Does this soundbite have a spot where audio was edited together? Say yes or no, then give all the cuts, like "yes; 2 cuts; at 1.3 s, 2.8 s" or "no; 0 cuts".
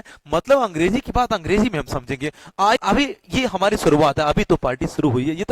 yes; 1 cut; at 2.8 s